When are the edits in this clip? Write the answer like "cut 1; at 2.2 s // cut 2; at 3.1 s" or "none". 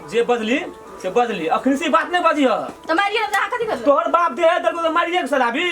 cut 1; at 2.7 s